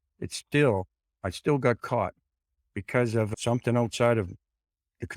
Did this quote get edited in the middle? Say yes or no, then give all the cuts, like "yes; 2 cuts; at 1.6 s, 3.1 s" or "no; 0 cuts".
yes; 1 cut; at 3.3 s